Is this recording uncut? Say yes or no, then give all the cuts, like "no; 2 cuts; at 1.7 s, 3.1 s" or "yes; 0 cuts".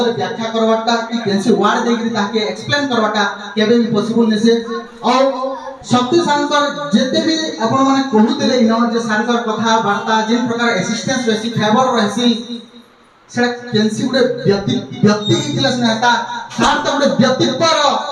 yes; 0 cuts